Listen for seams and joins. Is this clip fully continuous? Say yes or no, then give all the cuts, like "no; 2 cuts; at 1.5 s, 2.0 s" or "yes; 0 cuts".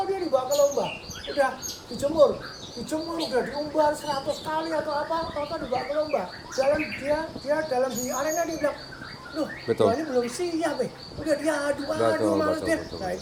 yes; 0 cuts